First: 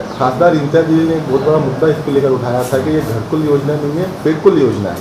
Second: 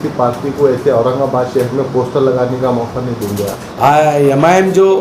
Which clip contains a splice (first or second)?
second